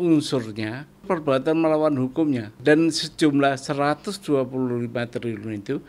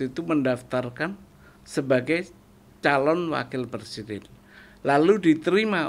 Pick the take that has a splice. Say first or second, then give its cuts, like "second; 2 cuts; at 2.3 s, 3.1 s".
first; 2 cuts; at 1.0 s, 2.6 s